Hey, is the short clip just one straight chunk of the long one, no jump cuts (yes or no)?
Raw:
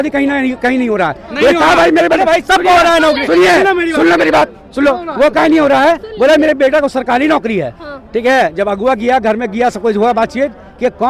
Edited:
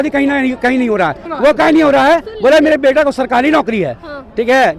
no